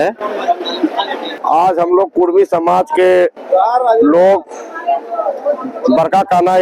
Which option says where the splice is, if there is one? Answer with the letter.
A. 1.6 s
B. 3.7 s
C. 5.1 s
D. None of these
A